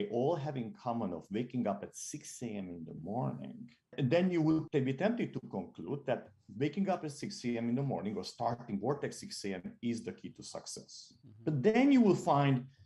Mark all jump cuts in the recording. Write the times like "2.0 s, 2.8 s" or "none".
3.9 s, 4.7 s